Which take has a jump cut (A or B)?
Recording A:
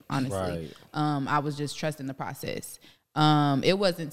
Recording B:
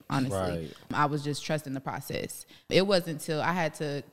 B